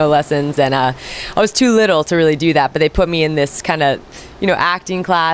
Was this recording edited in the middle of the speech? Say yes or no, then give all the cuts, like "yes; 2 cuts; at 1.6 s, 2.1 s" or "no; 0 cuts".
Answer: yes; 1 cut; at 1.3 s